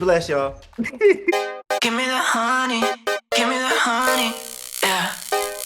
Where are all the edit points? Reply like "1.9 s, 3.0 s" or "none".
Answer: 1.3 s